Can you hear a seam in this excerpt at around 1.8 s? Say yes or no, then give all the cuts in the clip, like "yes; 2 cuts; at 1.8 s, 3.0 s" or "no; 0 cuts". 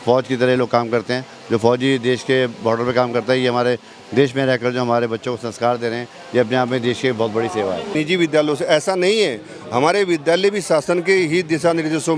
no; 1 cut; at 7.9 s